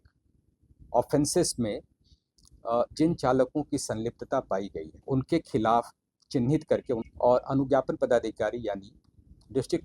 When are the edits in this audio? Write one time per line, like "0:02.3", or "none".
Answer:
0:04.9
0:07.0